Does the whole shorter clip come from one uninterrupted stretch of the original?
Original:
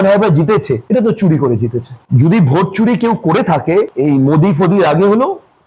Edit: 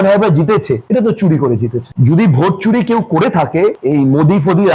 no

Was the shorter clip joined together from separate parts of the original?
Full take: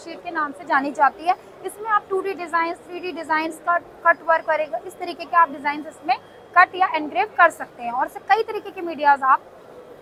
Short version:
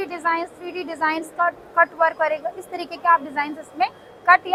no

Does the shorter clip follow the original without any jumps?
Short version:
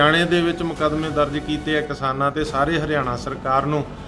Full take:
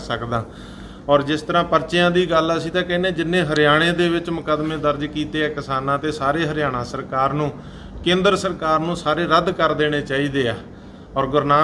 yes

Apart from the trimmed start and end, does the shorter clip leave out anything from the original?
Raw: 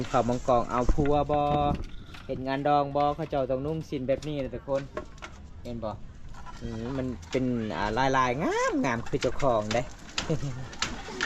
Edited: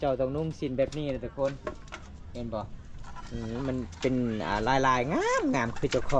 no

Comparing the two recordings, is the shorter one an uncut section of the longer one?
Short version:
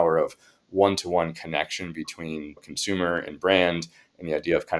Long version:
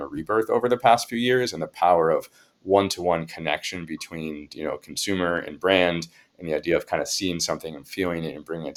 no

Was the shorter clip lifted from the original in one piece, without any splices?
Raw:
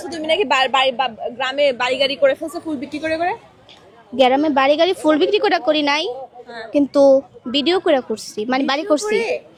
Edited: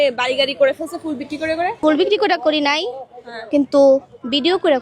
no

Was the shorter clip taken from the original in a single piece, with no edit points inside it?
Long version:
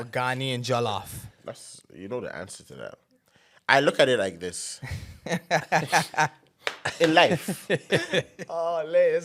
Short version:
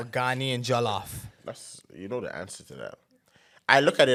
yes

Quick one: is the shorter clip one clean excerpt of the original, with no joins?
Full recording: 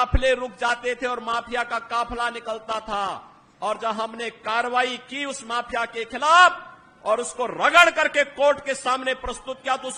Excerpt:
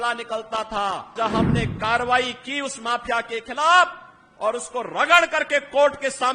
no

